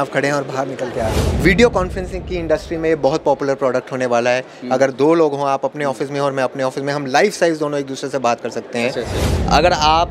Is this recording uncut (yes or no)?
no